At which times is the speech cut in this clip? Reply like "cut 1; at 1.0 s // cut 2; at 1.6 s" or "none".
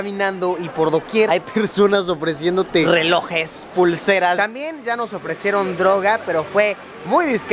cut 1; at 1.3 s // cut 2; at 2.9 s // cut 3; at 4.4 s